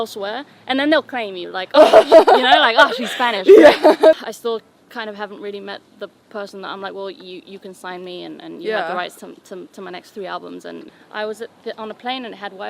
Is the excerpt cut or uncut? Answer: cut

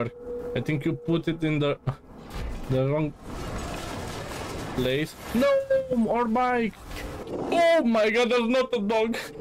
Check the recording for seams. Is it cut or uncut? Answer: cut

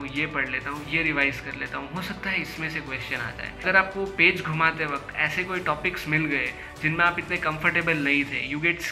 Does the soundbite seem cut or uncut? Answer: cut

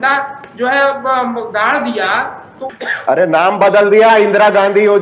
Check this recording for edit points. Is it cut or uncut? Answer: cut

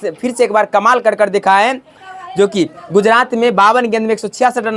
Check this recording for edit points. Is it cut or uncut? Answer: uncut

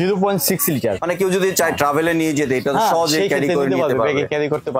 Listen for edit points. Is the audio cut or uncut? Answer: cut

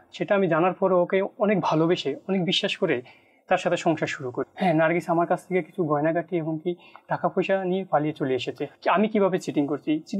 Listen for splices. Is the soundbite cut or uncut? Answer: cut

